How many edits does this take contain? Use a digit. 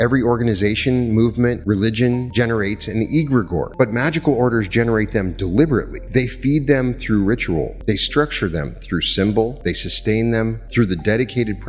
6